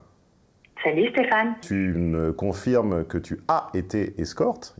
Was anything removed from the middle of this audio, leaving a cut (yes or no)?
yes